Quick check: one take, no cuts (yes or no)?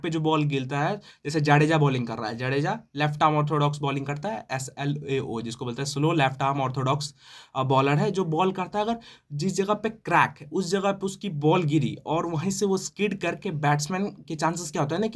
yes